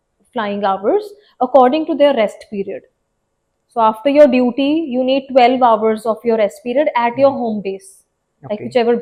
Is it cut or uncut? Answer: uncut